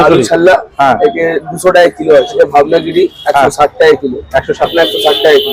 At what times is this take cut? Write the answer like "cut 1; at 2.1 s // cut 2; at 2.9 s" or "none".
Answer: cut 1; at 2.4 s // cut 2; at 4.7 s